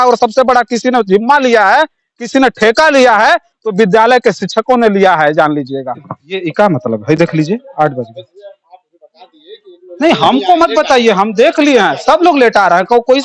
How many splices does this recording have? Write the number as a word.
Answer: one